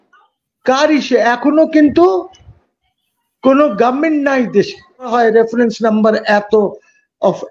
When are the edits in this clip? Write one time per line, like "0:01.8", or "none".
0:05.1